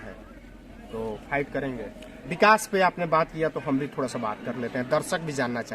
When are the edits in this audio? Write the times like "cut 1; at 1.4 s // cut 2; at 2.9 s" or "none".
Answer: cut 1; at 2.3 s